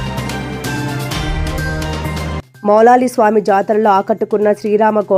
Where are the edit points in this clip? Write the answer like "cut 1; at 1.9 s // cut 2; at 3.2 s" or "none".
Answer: cut 1; at 2.5 s